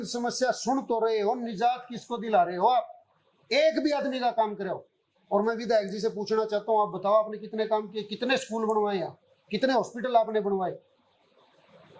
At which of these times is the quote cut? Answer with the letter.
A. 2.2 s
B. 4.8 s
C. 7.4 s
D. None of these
D